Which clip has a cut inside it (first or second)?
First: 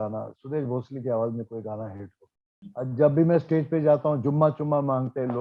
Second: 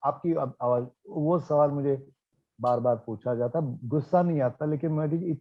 first